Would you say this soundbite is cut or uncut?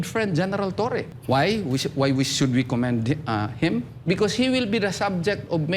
cut